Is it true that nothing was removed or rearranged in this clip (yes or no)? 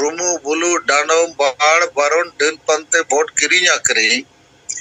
yes